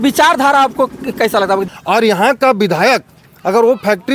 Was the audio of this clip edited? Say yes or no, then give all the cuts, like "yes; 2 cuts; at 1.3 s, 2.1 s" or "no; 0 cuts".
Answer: yes; 1 cut; at 1.7 s